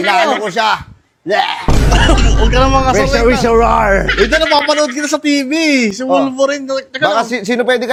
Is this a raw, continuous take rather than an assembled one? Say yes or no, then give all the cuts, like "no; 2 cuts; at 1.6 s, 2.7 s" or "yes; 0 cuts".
yes; 0 cuts